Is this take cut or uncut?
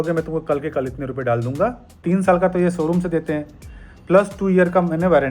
cut